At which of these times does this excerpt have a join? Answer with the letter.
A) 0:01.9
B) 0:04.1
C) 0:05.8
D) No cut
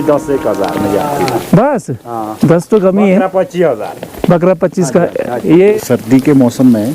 C